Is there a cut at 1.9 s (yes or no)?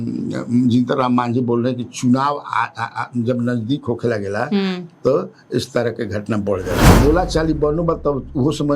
no